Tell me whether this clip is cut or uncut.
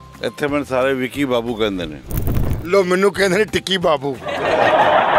uncut